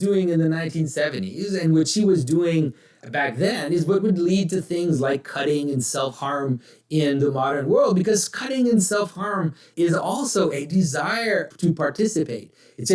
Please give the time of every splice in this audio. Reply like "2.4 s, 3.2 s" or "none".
3.0 s, 9.7 s, 11.5 s